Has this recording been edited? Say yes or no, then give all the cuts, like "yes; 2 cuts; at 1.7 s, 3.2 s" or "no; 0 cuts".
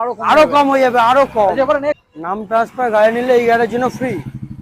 yes; 1 cut; at 2.0 s